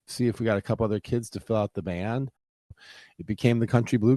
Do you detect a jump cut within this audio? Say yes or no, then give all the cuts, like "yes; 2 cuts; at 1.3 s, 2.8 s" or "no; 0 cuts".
yes; 1 cut; at 2.9 s